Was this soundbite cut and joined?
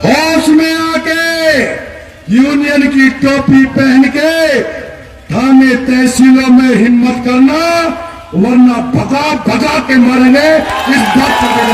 no; 0 cuts

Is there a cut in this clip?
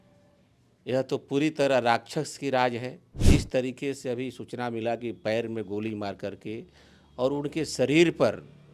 yes; 1 cut; at 3.2 s

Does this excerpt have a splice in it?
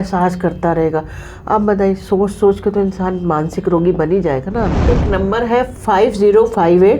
yes; 1 cut; at 4.7 s

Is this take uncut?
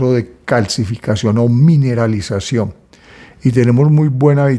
yes; 0 cuts

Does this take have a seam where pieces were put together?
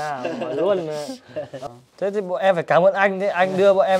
yes; 1 cut; at 1.5 s

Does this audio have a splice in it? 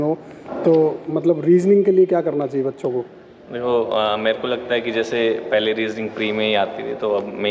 no; 0 cuts

